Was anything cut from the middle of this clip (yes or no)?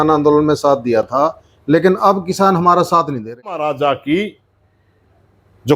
yes